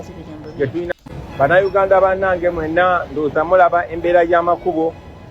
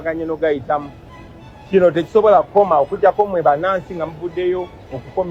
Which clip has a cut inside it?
first; 1 cut; at 0.9 s

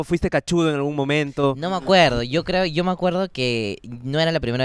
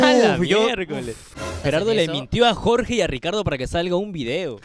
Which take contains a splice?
second; 1 cut; at 1.6 s

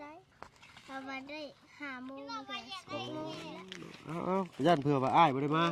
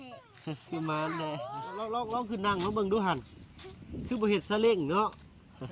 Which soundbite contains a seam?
second; 1 cut; at 1.7 s

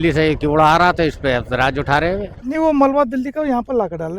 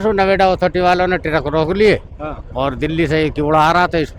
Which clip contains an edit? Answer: first; 1 cut; at 2.3 s

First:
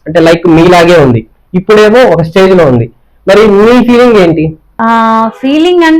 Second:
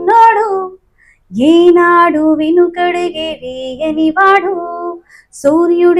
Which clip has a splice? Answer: first; 1 cut; at 4.6 s

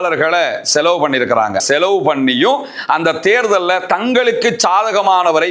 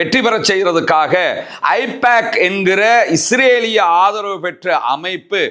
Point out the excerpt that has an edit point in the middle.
first; 1 cut; at 1.6 s

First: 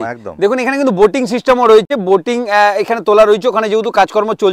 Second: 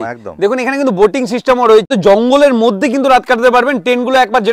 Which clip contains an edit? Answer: second; 1 cut; at 1.9 s

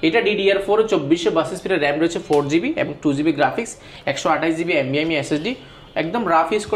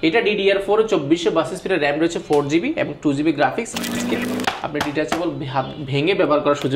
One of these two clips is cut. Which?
second; 1 cut; at 4.0 s

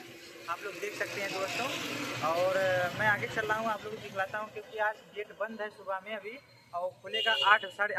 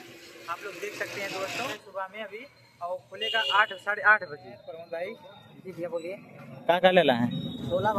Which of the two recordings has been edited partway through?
second; 2 cuts; at 1.8 s, 4.6 s

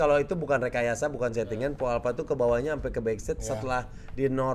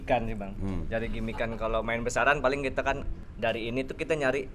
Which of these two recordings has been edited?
second; 1 cut; at 3.1 s

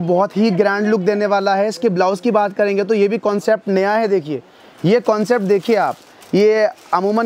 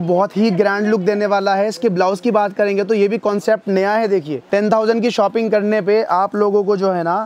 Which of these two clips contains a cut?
second; 1 cut; at 4.4 s

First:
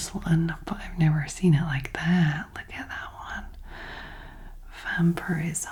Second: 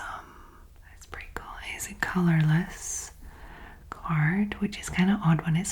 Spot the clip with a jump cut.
second; 1 cut; at 1.1 s

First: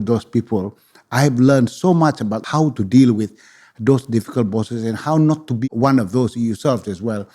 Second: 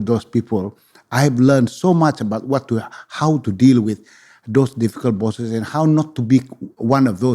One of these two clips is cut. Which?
first; 2 cuts; at 2.4 s, 5.5 s

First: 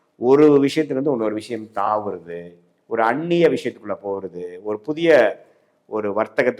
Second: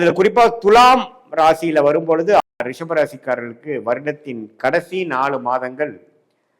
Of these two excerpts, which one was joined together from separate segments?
second; 1 cut; at 2.4 s

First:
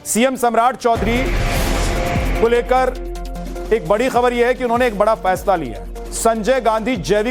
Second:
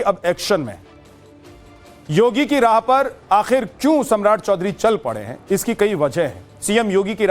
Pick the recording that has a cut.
second; 1 cut; at 4.7 s

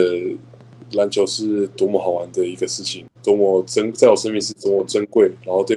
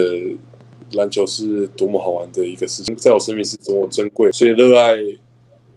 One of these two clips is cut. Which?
second; 2 cuts; at 2.9 s, 4.3 s

